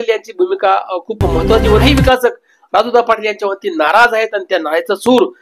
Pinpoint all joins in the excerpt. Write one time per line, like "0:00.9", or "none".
0:01.8